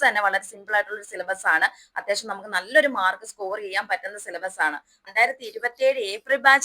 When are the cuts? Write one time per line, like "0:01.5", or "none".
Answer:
0:05.1